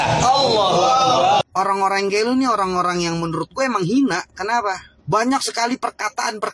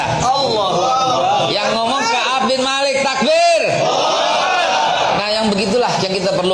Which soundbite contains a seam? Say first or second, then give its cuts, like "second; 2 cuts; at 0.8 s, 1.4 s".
first; 2 cuts; at 1.4 s, 4.9 s